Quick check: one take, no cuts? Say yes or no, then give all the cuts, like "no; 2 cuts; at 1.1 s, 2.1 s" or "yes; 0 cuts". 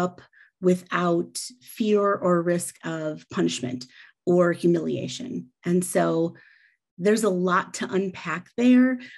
yes; 0 cuts